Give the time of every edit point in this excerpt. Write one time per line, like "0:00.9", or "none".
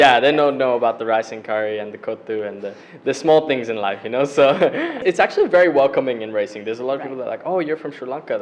0:05.0